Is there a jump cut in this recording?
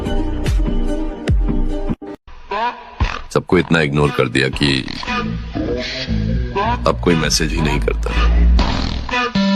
no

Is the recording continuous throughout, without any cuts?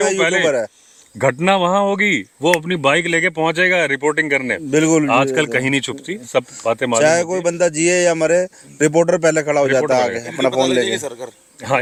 yes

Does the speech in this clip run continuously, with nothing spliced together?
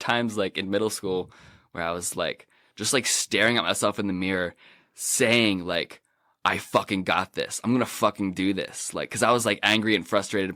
yes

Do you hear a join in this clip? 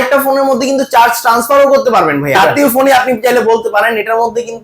yes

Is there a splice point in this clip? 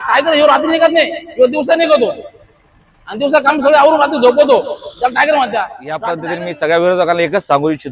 yes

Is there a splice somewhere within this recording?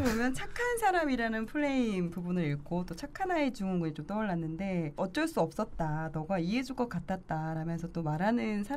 yes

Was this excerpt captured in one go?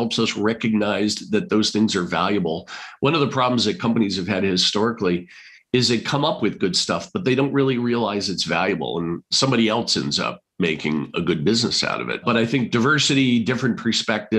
no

